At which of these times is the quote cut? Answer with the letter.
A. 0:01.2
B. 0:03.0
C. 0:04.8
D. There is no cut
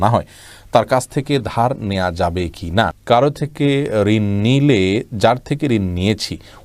B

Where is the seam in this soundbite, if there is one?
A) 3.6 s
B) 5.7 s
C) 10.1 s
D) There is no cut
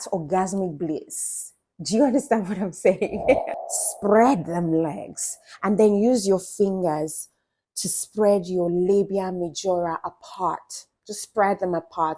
A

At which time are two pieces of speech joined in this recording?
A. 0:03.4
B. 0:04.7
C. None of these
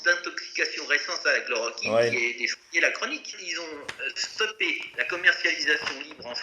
A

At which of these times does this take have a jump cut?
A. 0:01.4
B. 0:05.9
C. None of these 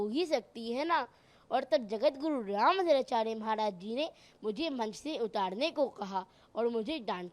C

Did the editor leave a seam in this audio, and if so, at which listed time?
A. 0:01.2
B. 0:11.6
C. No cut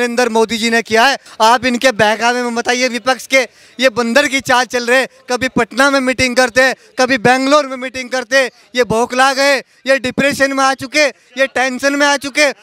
A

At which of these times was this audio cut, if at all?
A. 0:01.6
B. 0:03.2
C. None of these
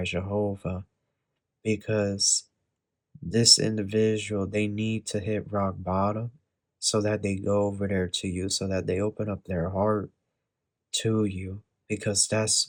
C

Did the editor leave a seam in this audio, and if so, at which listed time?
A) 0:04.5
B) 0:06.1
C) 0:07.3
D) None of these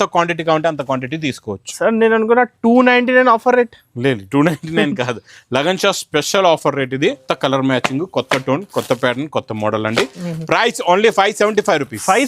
C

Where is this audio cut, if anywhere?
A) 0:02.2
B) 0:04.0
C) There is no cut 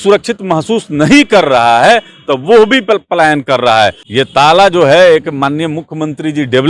B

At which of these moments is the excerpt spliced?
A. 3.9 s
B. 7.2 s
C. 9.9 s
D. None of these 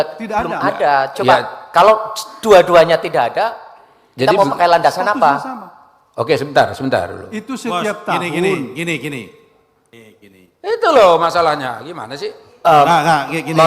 C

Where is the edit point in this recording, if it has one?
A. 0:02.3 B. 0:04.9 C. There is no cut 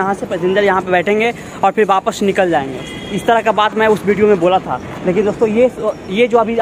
C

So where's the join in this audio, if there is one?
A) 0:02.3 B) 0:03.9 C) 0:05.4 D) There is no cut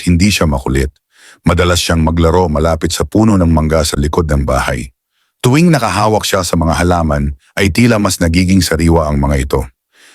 B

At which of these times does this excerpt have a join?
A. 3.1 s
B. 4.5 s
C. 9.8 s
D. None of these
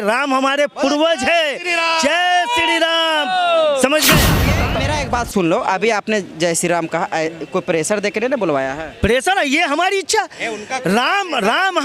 B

